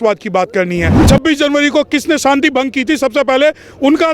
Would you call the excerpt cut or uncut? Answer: cut